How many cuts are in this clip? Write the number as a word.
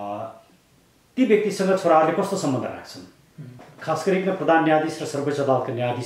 one